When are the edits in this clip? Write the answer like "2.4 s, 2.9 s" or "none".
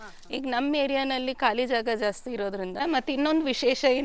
2.8 s